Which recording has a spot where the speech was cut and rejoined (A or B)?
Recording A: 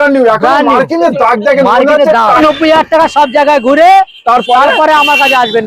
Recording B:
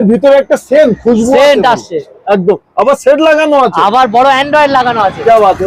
A